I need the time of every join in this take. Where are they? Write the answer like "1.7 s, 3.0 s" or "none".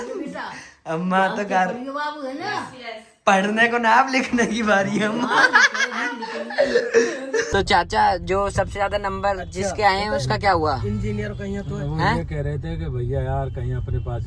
7.5 s